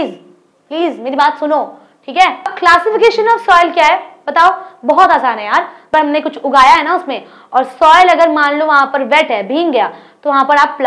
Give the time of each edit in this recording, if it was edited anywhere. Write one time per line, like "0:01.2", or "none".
0:02.5
0:05.9